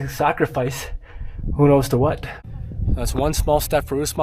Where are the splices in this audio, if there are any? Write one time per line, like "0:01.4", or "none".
0:02.3